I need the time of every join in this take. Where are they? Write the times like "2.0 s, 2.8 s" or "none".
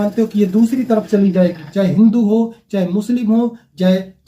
1.6 s